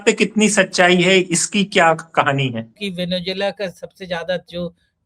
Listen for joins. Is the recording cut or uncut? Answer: cut